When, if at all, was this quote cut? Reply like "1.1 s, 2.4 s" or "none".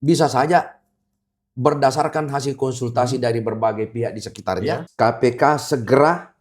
4.9 s